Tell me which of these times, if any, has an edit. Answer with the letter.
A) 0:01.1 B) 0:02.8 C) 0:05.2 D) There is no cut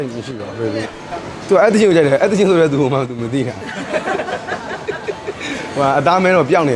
A